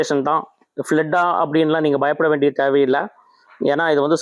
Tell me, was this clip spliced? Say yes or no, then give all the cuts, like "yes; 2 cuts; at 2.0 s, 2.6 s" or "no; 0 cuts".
no; 0 cuts